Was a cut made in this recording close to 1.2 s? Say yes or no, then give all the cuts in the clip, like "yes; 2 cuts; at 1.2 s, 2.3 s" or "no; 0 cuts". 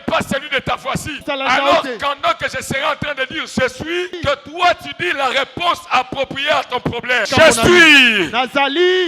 yes; 3 cuts; at 1.2 s, 4.1 s, 7.2 s